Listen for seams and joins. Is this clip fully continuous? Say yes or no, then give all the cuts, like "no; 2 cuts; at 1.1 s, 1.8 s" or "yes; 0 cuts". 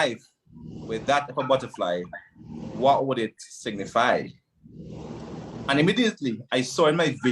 yes; 0 cuts